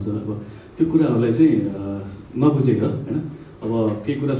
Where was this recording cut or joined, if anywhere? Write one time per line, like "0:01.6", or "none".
none